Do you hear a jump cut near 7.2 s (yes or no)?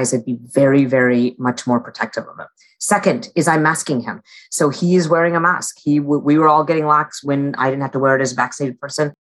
yes